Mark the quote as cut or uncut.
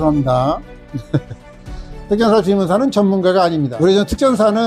cut